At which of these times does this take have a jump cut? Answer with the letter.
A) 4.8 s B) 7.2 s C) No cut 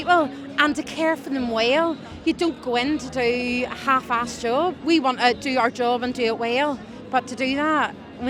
A